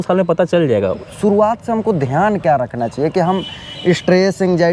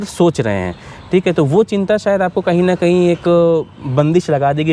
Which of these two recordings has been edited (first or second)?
first